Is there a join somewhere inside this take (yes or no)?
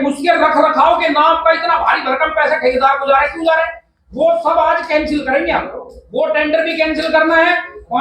no